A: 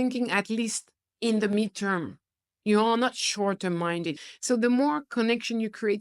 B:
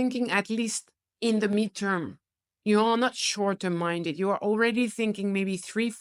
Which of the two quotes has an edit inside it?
A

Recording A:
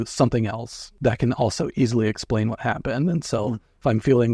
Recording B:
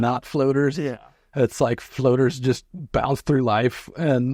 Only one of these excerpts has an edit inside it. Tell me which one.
A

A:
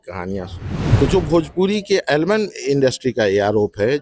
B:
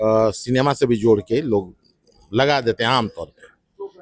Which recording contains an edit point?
A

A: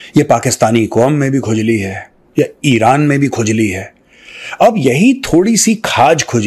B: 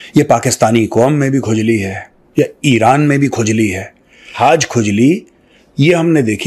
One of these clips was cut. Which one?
B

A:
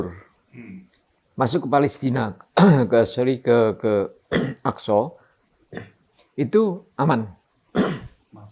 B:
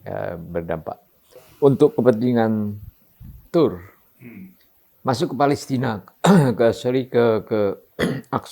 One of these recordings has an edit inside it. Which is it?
B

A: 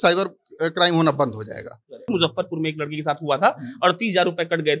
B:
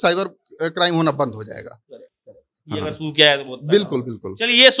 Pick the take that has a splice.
A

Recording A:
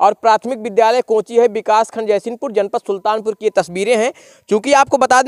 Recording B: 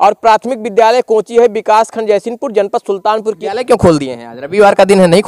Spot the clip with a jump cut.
B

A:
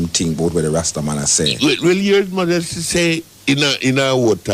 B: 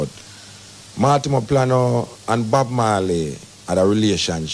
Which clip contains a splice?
A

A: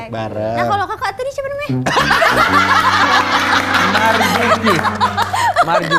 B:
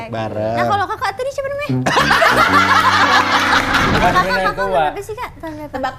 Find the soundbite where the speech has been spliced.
B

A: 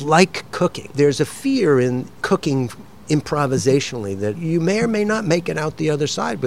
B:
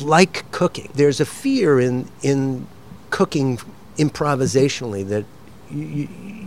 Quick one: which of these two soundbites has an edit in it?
A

